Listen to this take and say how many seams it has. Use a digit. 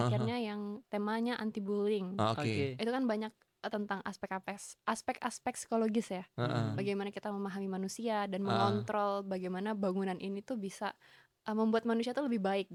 0